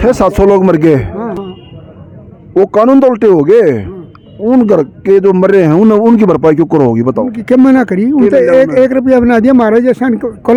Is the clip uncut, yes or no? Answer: yes